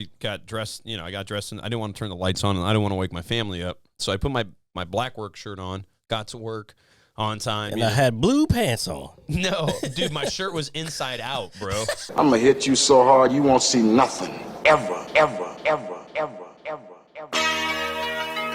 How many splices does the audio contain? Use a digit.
1